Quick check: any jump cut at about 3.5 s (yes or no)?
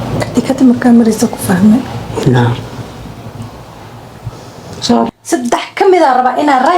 no